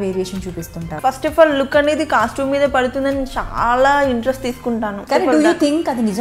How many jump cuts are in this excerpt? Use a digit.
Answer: 2